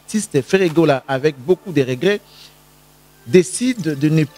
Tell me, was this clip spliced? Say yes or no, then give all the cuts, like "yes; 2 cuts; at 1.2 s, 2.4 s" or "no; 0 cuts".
no; 0 cuts